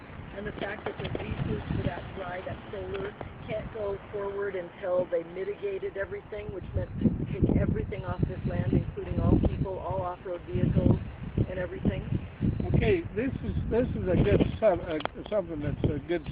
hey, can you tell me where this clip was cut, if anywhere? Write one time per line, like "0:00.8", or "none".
0:04.1